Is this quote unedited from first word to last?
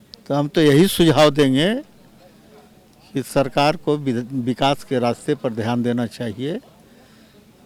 yes; 0 cuts

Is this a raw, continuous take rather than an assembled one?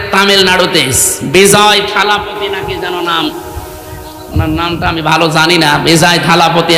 yes; 0 cuts

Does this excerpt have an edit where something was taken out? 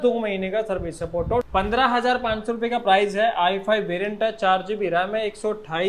yes; 1 cut; at 1.4 s

